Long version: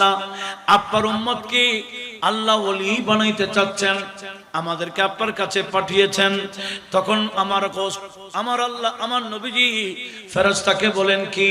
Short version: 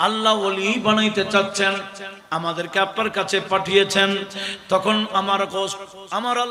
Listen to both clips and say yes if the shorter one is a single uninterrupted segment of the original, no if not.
yes